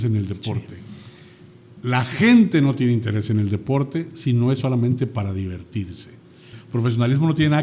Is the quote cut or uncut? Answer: cut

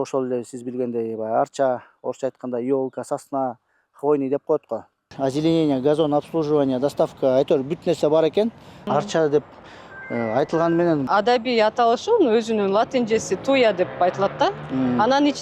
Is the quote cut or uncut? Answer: cut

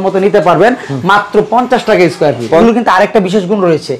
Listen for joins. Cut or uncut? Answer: cut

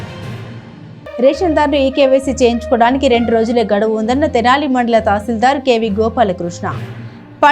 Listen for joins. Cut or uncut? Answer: uncut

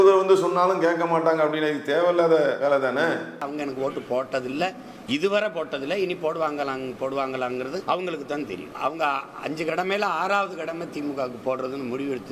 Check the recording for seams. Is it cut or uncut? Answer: cut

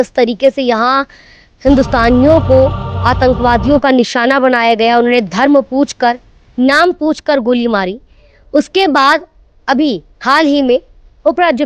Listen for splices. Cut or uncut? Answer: uncut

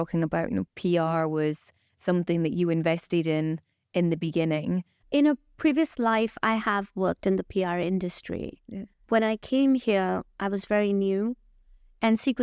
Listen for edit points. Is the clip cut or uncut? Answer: cut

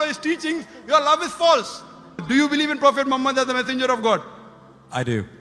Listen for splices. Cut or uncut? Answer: cut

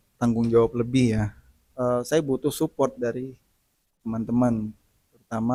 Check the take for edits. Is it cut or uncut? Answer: uncut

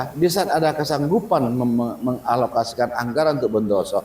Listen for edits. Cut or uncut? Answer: uncut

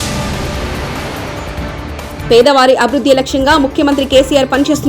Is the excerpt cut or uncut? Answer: uncut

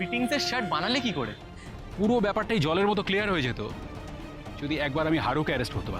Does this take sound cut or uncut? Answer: cut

